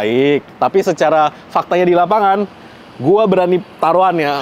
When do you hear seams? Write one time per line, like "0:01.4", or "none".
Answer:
none